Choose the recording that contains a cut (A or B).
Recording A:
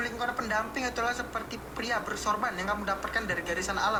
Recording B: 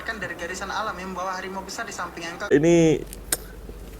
B